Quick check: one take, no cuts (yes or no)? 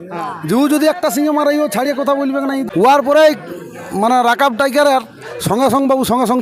no